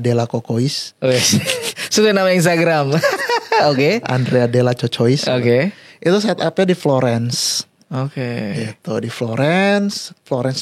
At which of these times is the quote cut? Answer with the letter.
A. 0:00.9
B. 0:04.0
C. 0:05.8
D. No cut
D